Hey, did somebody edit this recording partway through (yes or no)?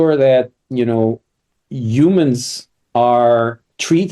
no